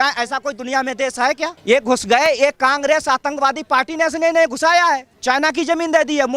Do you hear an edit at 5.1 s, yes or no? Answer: no